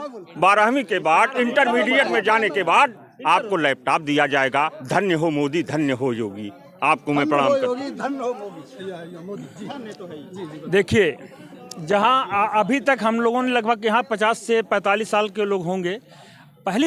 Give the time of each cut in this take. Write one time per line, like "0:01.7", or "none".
none